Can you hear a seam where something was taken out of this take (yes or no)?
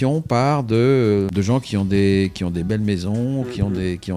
yes